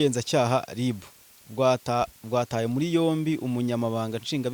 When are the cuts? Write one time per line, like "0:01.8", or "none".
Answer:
none

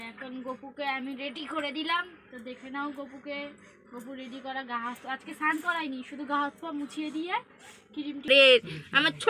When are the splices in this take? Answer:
0:08.3

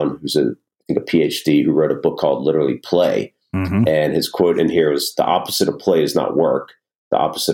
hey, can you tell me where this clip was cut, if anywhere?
none

